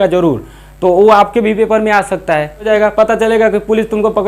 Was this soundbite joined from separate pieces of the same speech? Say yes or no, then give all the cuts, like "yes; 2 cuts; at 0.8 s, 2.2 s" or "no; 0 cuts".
yes; 1 cut; at 2.7 s